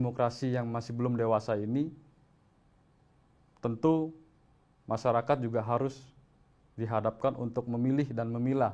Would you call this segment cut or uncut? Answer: uncut